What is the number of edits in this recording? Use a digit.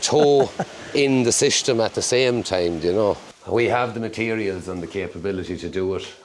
1